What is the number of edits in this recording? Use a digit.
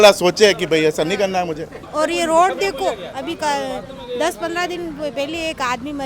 1